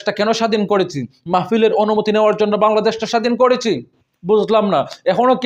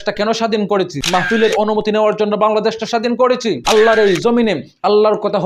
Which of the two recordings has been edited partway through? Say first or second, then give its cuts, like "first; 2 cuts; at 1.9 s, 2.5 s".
second; 2 cuts; at 1.1 s, 3.7 s